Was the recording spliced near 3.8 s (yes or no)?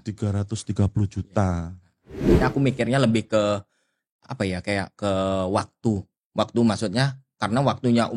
no